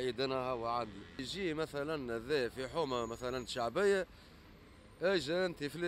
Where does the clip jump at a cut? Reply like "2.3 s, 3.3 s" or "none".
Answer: 1.3 s